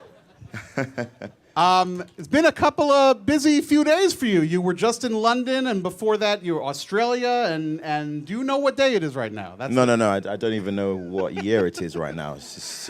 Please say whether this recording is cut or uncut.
cut